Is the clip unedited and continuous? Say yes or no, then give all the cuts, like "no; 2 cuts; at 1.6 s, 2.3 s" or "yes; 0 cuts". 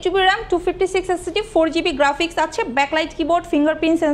yes; 0 cuts